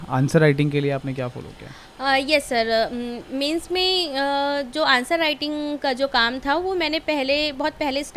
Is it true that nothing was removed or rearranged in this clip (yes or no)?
yes